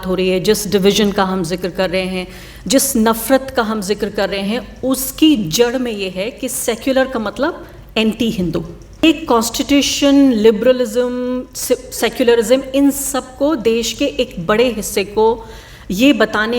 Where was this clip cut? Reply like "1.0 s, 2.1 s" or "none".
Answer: 9.0 s